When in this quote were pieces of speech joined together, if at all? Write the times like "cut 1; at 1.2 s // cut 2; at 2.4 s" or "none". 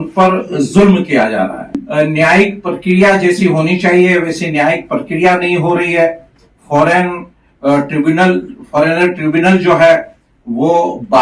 cut 1; at 1.7 s